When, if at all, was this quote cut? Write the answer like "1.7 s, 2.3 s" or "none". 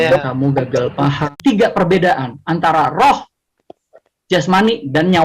1.2 s

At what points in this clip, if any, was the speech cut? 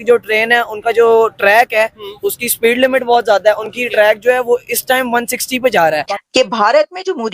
6.1 s

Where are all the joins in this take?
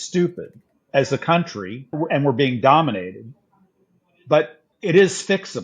0.8 s, 1.9 s, 4.6 s

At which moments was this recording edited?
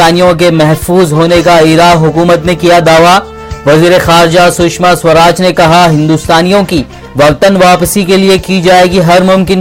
none

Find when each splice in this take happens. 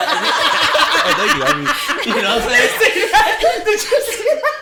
none

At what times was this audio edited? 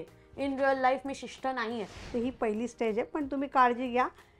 2.0 s

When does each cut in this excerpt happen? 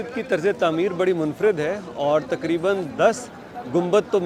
none

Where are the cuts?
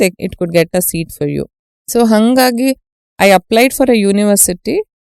none

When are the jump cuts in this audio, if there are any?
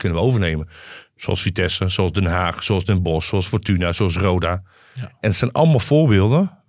none

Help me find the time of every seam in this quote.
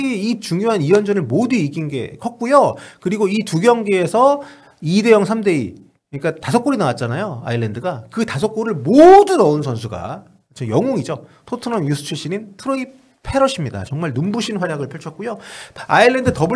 15.6 s

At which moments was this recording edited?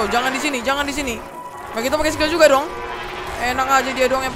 1.7 s

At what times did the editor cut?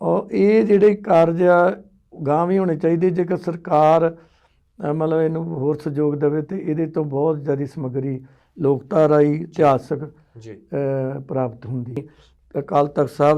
12.2 s

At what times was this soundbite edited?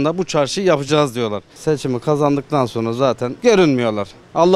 1.5 s, 3.3 s

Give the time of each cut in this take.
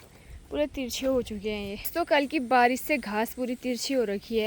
1.9 s

